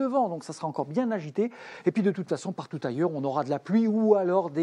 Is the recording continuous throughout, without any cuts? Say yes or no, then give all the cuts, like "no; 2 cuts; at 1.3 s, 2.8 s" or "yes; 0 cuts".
no; 1 cut; at 3.4 s